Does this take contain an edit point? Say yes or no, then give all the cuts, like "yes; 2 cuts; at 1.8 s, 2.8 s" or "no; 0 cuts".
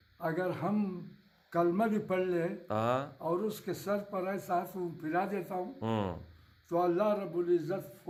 no; 0 cuts